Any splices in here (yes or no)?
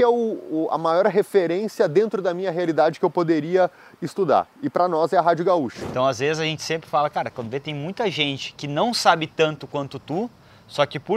yes